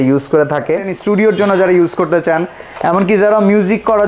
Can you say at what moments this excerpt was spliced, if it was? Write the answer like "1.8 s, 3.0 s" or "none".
0.9 s